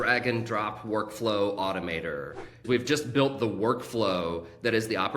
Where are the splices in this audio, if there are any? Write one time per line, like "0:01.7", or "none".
0:02.6